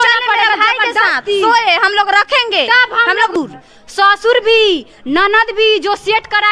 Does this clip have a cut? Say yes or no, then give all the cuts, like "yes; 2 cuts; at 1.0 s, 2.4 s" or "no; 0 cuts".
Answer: yes; 1 cut; at 3.4 s